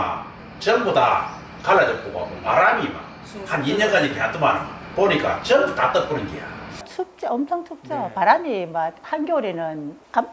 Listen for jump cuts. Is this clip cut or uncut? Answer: cut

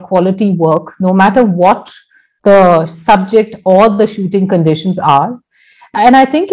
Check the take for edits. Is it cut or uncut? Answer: uncut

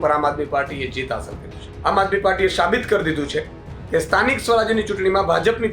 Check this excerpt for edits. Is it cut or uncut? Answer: cut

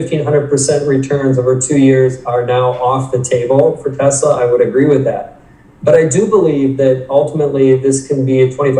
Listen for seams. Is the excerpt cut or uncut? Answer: uncut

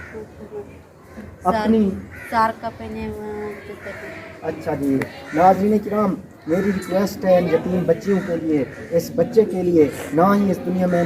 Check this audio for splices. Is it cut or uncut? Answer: cut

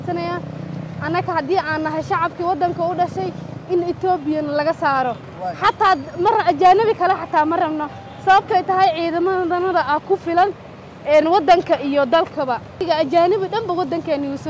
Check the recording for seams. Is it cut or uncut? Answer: cut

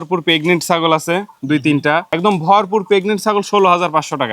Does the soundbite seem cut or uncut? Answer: cut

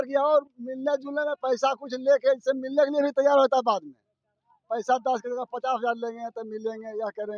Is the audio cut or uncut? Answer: uncut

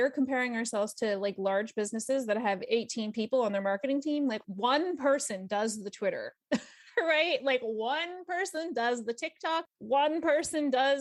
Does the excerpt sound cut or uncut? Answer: uncut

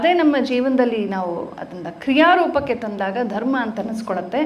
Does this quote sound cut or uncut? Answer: uncut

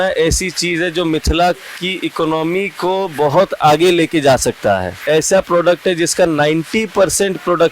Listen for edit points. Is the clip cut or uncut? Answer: cut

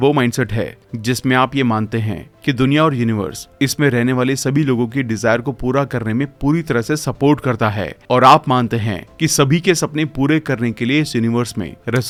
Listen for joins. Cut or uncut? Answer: uncut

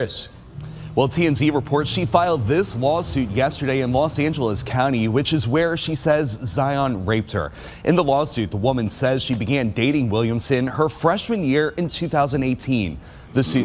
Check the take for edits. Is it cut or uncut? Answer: uncut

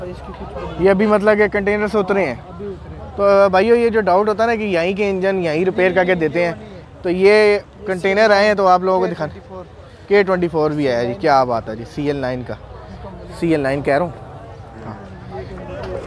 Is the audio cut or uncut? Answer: uncut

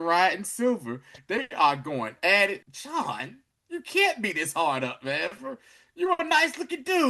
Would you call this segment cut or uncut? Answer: cut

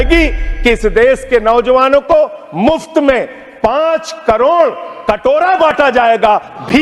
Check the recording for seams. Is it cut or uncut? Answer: uncut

